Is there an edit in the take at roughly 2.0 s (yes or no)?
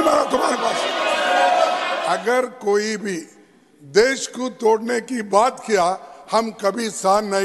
yes